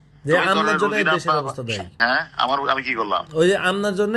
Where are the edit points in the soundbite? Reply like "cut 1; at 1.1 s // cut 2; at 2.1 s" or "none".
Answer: cut 1; at 1.9 s